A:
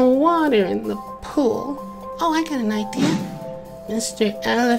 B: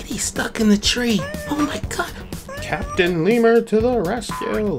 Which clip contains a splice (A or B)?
A